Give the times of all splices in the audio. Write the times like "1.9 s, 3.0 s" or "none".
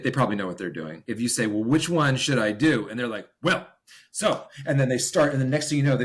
1.1 s